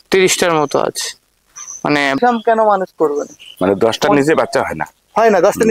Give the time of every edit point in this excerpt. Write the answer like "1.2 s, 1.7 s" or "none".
2.2 s

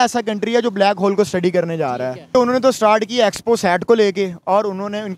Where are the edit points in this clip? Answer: 2.4 s

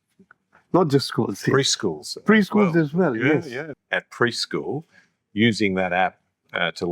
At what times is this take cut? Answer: 3.6 s

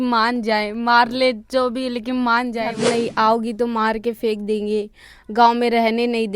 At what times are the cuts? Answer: 2.7 s

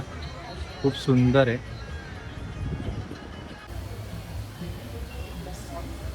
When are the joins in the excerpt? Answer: 3.7 s

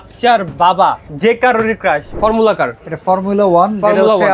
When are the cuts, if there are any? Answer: 1.1 s, 2.1 s

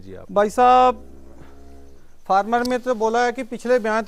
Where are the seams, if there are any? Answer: none

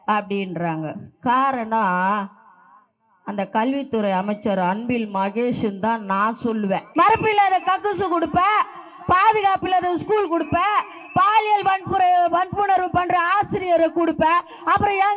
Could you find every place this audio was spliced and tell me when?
6.9 s

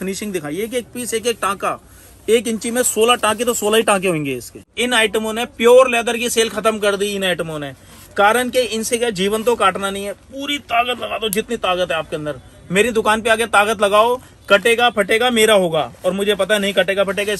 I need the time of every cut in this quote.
4.7 s

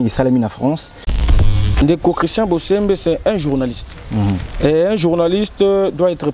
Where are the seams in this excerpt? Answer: 1.3 s

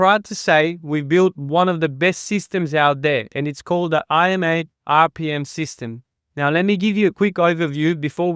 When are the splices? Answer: none

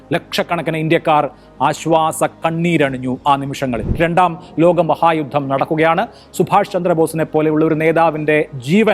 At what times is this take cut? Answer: 3.9 s

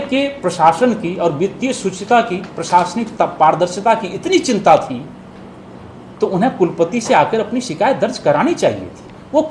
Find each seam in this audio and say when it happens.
none

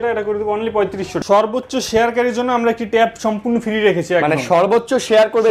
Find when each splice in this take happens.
1.1 s

